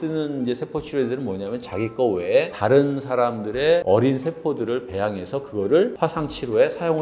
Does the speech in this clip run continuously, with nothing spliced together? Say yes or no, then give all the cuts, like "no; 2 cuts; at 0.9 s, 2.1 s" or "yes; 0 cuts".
yes; 0 cuts